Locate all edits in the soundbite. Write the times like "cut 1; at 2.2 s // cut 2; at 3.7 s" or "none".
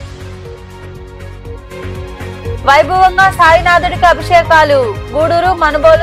none